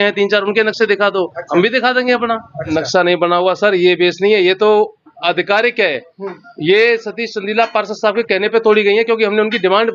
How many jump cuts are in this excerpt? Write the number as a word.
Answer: one